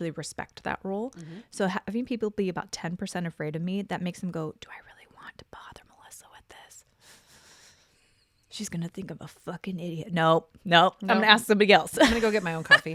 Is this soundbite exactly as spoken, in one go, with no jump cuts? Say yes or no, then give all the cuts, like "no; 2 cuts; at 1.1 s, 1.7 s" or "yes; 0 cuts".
yes; 0 cuts